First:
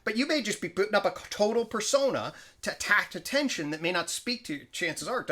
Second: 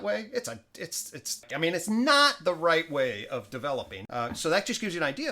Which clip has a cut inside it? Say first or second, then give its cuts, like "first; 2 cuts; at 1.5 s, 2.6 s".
second; 2 cuts; at 1.4 s, 4.0 s